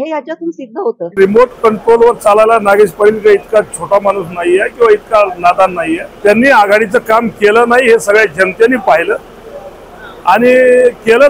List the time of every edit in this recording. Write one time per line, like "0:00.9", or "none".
0:01.2
0:06.1